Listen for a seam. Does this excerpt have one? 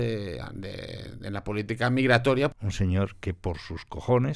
yes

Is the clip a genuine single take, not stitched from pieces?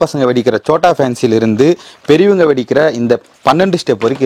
yes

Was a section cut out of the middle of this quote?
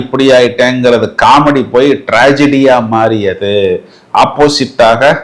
no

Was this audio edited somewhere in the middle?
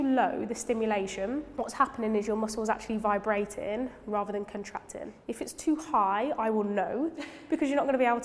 yes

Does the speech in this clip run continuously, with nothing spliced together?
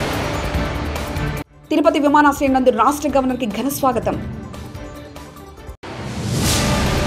yes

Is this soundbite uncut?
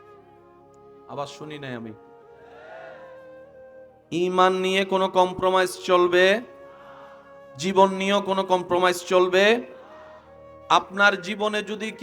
no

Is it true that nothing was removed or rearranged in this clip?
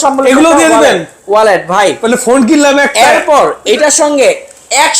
yes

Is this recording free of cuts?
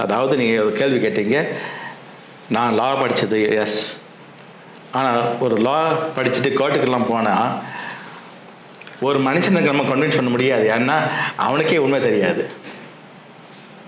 yes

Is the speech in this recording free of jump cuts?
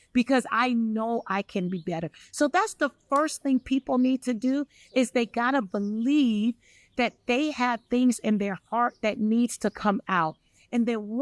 yes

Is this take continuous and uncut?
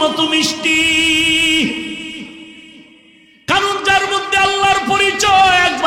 yes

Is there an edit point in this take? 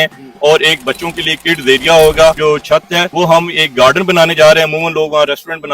yes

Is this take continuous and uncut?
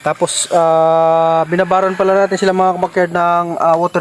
yes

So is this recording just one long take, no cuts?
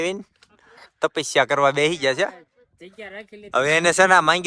yes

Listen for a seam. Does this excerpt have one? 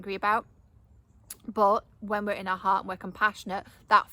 no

